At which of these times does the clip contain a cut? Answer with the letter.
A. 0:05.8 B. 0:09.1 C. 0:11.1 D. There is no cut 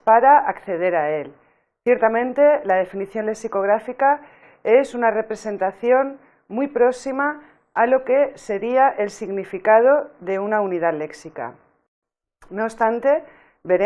A